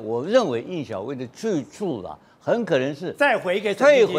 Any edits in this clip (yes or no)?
no